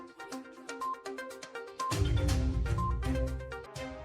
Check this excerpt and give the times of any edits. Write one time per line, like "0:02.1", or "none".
0:02.5